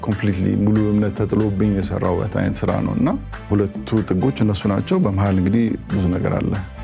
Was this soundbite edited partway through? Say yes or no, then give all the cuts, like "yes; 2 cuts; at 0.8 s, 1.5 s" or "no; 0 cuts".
no; 0 cuts